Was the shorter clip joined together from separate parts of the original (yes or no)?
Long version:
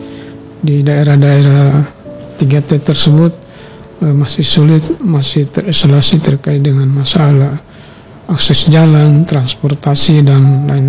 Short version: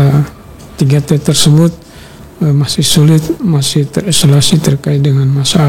no